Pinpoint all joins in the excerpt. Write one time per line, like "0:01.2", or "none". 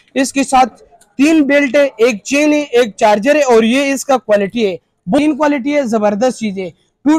0:05.2